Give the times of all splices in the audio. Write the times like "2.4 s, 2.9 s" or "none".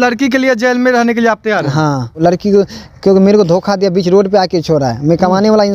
2.2 s